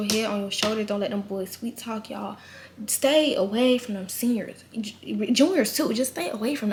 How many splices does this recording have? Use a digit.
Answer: 0